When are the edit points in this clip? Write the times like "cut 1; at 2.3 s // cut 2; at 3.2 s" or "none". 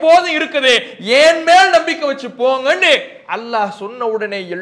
none

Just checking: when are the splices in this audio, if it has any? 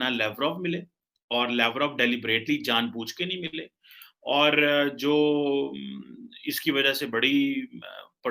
none

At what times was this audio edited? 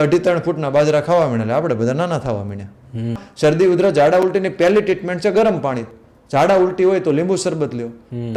cut 1; at 3.2 s // cut 2; at 5.8 s

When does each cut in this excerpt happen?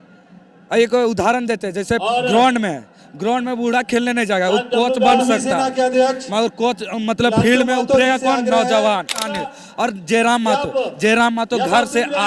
cut 1; at 9.4 s

